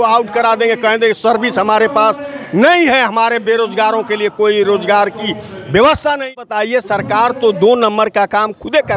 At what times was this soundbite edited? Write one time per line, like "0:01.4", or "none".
0:06.4